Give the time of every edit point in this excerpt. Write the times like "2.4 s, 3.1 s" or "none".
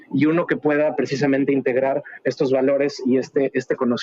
none